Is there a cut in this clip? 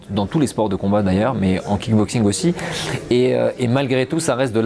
no; 0 cuts

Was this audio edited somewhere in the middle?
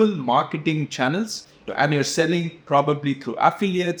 no; 0 cuts

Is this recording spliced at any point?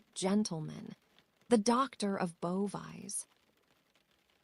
no; 0 cuts

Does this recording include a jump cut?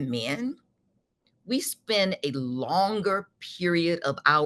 no; 0 cuts

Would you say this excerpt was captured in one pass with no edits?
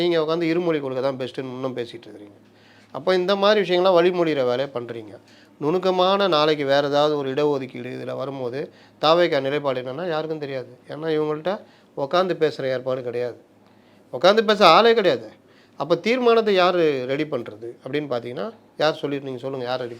yes; 0 cuts

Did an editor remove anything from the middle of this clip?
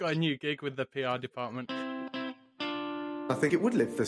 yes; 1 cut; at 1.6 s

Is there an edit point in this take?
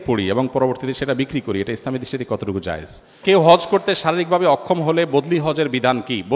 yes; 1 cut; at 3.2 s

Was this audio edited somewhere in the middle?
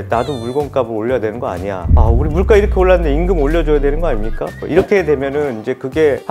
no; 0 cuts

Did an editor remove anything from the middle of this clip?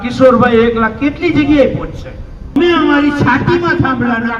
yes; 1 cut; at 2.6 s

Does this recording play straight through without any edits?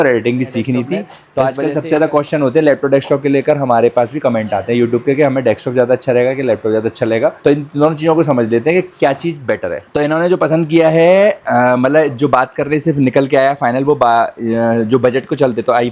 no; 2 cuts; at 1.2 s, 9.8 s

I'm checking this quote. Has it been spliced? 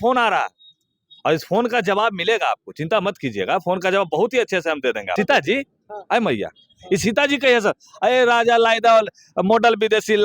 yes; 1 cut; at 5.1 s

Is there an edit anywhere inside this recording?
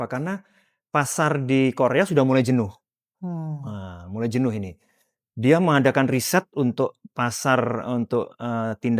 no; 0 cuts

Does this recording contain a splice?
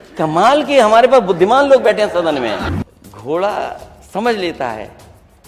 yes; 1 cut; at 2.7 s

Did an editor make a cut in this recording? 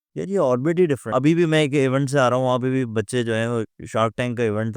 yes; 1 cut; at 1.1 s

